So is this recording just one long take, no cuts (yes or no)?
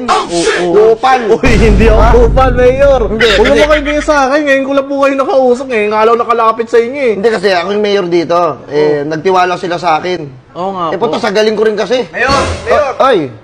yes